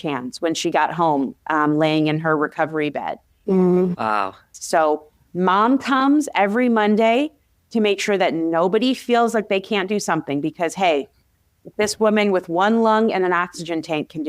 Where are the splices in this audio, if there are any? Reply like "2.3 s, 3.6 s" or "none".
4.5 s